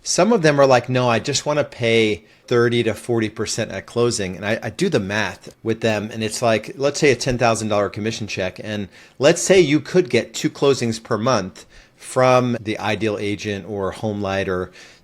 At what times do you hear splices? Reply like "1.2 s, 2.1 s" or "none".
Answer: 12.6 s